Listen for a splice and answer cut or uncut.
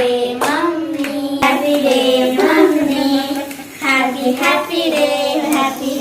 cut